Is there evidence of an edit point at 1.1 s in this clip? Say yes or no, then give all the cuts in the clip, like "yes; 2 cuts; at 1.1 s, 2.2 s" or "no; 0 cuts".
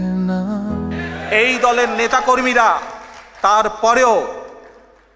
yes; 1 cut; at 1.1 s